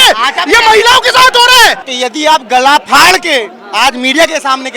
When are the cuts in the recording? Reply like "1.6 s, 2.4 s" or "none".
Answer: 1.9 s

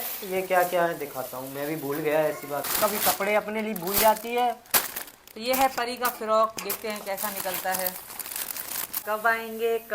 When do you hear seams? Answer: 2.7 s, 9.0 s

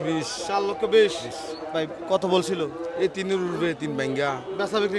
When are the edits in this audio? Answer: none

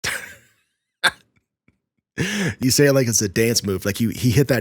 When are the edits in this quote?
2.6 s

